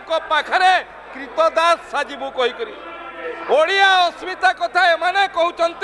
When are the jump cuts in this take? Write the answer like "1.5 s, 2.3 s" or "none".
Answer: none